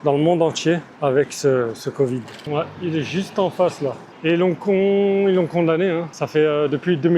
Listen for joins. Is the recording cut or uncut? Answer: cut